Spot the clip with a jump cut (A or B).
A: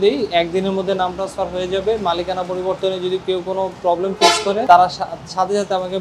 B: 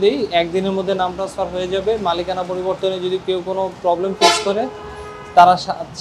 A